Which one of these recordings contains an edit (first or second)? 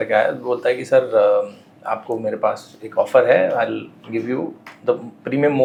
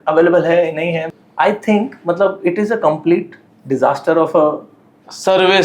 second